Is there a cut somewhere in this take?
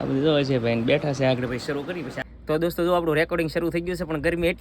yes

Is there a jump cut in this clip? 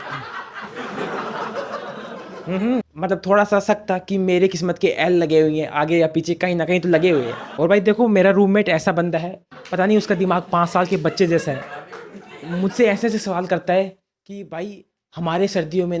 yes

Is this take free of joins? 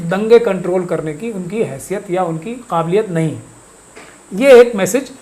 yes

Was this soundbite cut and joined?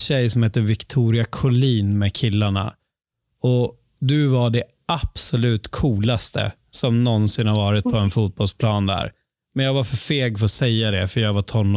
no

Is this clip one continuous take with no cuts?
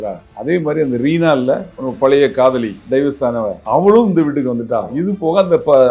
no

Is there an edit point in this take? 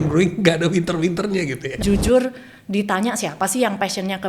yes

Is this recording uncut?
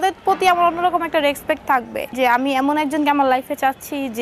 no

